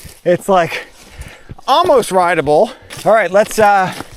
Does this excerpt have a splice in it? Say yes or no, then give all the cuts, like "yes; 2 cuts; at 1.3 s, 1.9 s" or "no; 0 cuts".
yes; 1 cut; at 2.9 s